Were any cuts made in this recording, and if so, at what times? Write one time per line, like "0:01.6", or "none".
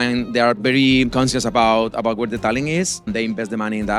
0:01.1
0:03.1